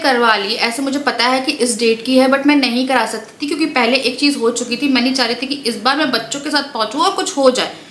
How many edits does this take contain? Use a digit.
0